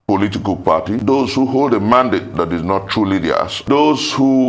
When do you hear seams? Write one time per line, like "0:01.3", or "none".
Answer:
0:01.0
0:03.6